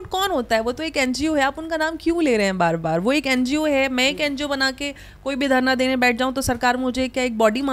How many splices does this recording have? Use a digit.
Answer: 0